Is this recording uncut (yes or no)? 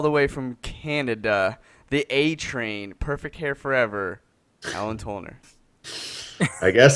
yes